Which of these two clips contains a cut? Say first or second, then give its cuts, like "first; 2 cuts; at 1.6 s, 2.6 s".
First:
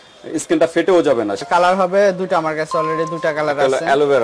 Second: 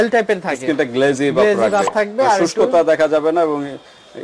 first; 1 cut; at 1.4 s